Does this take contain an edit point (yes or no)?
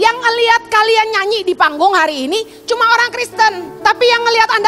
yes